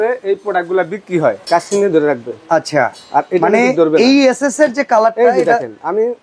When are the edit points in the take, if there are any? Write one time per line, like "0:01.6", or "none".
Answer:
0:01.4

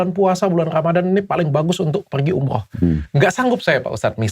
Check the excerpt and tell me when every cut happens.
0:03.1

